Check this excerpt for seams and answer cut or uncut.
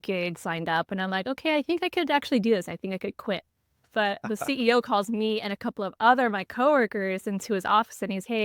uncut